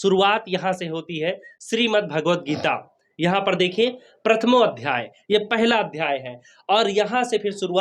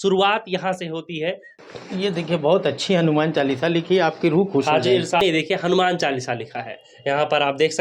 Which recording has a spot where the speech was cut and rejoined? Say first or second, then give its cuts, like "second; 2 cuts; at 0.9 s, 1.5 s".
second; 2 cuts; at 1.5 s, 5.2 s